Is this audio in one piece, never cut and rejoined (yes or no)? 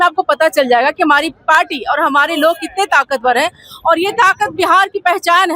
yes